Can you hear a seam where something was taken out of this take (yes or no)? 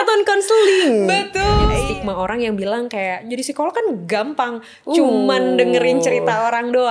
yes